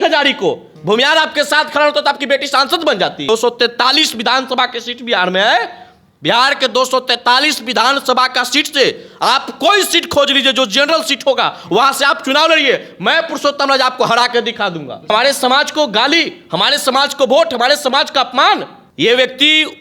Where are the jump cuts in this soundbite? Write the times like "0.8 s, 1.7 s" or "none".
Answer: 3.3 s, 15.1 s, 18.8 s